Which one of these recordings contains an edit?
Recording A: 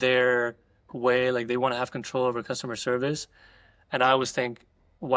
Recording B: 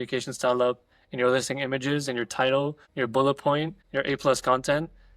B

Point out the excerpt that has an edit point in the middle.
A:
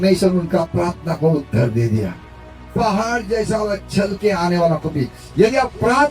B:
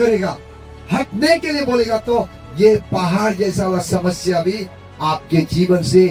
A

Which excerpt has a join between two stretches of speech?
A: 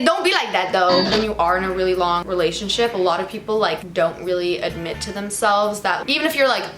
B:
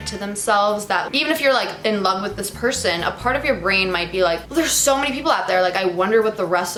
A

